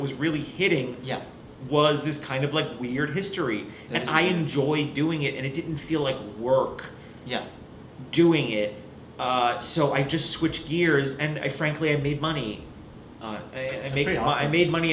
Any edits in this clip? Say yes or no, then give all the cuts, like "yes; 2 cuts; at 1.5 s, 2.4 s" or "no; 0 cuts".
no; 0 cuts